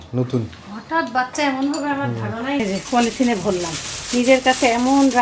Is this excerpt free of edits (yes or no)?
no